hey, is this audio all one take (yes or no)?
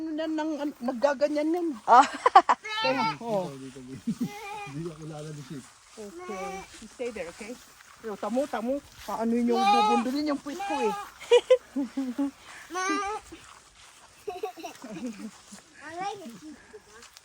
yes